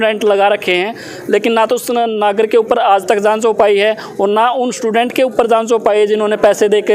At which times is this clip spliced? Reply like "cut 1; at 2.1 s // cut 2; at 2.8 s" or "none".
none